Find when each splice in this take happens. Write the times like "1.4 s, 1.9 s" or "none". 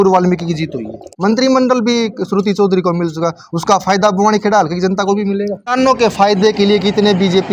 1.0 s, 5.6 s